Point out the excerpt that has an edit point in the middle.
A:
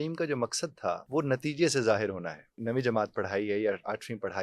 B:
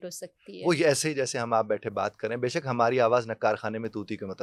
A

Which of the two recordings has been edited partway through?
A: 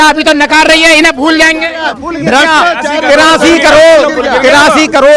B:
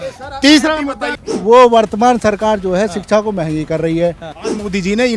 B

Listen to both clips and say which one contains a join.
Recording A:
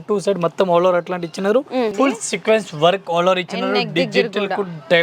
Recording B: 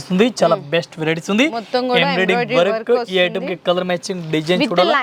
A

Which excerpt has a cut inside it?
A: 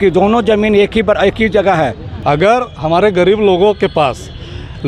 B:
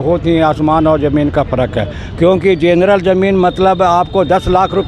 A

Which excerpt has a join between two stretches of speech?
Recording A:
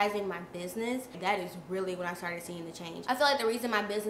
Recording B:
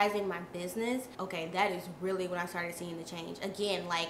A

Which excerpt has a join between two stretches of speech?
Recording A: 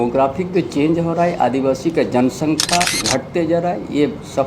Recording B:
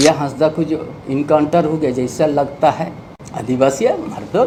A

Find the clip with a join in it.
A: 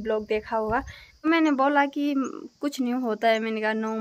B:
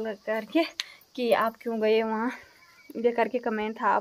A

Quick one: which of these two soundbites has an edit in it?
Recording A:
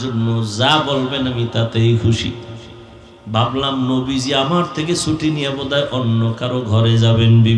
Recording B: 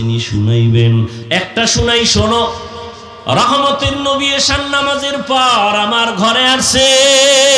B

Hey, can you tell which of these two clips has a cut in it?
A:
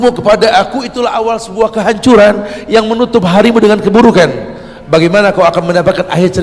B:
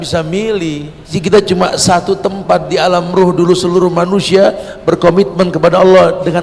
B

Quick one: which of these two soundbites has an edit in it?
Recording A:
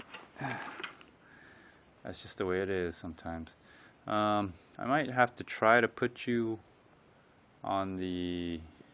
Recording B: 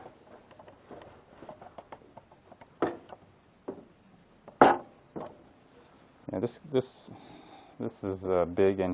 B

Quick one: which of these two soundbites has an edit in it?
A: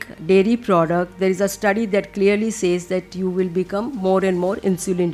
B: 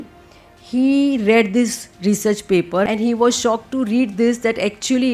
B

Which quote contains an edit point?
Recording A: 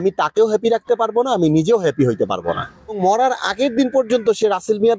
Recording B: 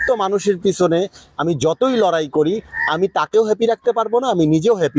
A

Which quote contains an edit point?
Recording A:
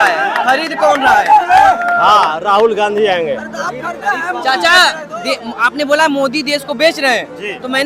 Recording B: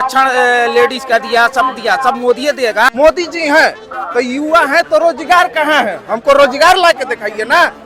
B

